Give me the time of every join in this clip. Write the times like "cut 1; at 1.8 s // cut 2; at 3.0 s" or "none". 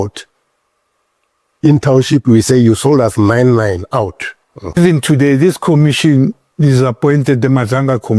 cut 1; at 4.8 s

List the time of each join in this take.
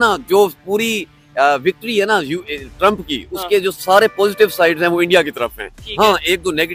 none

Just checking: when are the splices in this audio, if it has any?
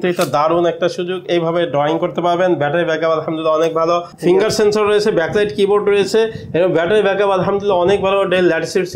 cut 1; at 4.1 s

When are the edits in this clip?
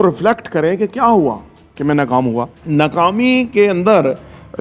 cut 1; at 2.6 s

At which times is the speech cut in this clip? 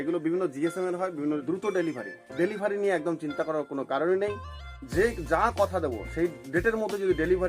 cut 1; at 1.4 s

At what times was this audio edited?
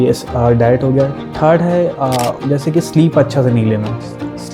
cut 1; at 2.4 s

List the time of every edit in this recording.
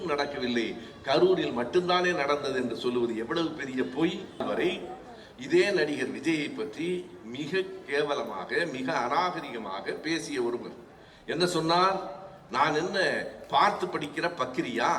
cut 1; at 4.4 s

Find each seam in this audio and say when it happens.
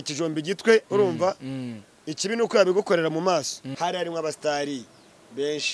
cut 1; at 3.6 s

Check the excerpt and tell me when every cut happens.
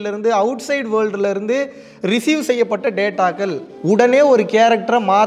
cut 1; at 3.7 s

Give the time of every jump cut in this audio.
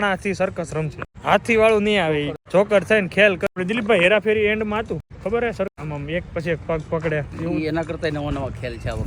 cut 1; at 1.0 s // cut 2; at 2.4 s // cut 3; at 3.5 s // cut 4; at 5.1 s // cut 5; at 5.7 s

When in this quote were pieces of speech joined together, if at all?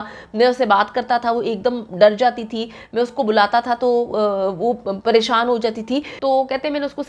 cut 1; at 6.1 s

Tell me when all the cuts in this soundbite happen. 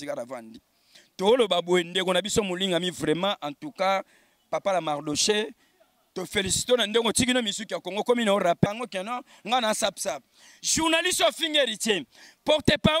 cut 1; at 8.7 s

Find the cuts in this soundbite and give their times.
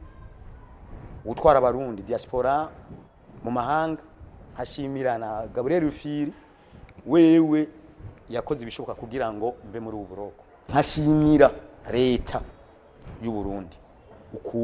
cut 1; at 10.7 s

